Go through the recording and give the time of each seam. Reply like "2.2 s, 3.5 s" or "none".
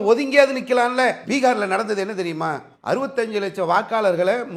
none